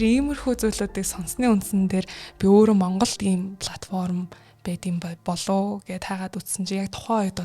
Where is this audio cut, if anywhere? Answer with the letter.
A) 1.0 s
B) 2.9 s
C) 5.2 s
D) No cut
C